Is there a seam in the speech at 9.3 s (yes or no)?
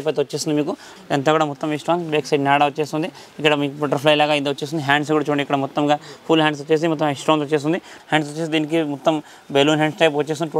no